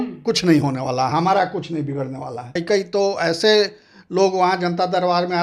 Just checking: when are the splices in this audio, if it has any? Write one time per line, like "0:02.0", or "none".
0:02.5